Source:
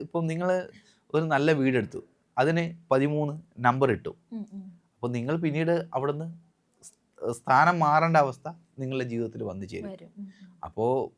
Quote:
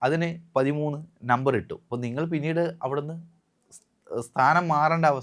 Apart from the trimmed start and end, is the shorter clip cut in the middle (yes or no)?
yes